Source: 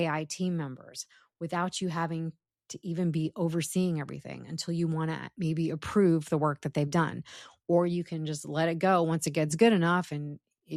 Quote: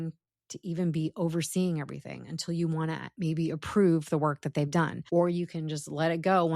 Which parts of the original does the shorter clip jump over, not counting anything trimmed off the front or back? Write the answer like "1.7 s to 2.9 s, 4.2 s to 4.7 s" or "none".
7.2 s to 7.6 s